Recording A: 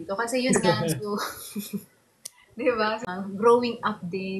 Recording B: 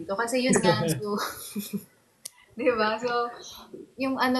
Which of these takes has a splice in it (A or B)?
A